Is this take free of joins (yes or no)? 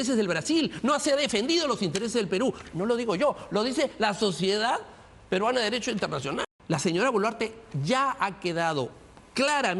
no